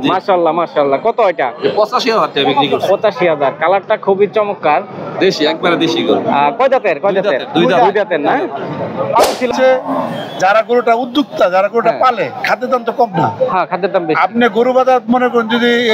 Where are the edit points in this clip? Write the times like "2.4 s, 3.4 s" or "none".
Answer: 9.5 s